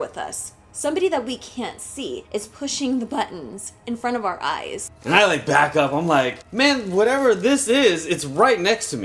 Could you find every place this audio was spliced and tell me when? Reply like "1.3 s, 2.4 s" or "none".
2.2 s, 4.9 s, 6.4 s